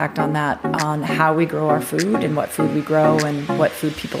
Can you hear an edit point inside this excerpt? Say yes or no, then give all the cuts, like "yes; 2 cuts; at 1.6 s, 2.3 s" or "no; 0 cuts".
no; 0 cuts